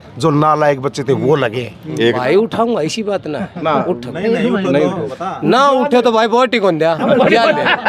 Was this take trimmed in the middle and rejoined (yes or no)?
yes